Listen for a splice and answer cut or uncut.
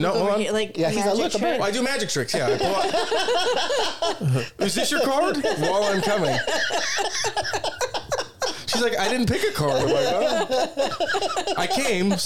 uncut